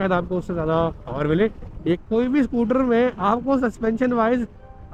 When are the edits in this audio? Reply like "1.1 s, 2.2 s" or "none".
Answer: 2.0 s